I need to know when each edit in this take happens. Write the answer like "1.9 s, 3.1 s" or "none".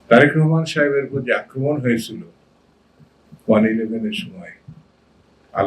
none